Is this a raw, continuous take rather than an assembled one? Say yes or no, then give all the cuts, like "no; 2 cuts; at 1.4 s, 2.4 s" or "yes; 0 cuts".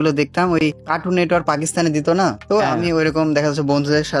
no; 2 cuts; at 0.9 s, 2.4 s